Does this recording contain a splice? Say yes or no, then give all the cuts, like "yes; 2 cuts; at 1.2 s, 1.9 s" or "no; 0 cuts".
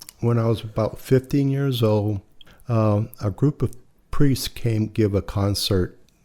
yes; 1 cut; at 2.4 s